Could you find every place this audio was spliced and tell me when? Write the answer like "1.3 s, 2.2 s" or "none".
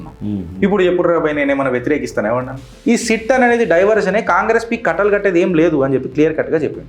2.7 s